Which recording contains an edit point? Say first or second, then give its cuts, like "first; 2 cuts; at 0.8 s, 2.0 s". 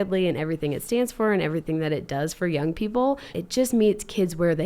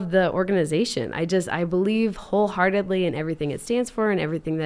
first; 1 cut; at 3.4 s